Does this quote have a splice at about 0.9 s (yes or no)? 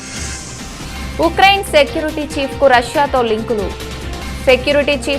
yes